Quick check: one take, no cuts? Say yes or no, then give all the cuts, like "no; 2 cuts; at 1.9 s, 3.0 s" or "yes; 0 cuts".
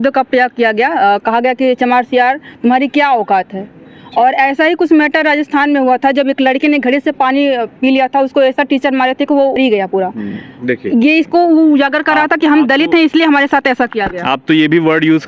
yes; 0 cuts